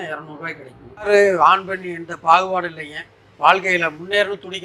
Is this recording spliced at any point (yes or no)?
yes